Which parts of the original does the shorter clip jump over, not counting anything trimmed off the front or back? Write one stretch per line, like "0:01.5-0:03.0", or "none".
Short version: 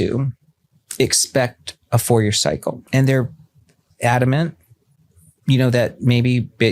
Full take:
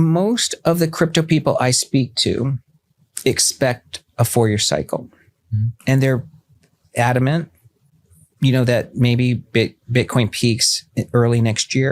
0:05.1-0:05.8